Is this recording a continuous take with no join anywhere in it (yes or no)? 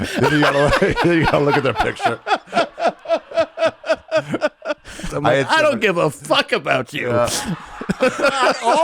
no